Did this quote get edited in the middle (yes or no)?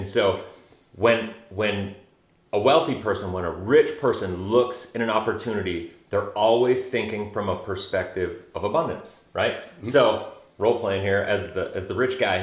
no